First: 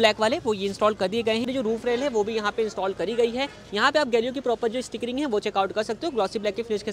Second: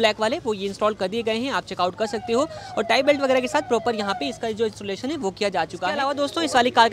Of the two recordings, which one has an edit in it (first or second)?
first